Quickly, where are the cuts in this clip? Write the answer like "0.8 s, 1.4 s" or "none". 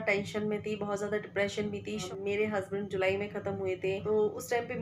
2.0 s, 4.0 s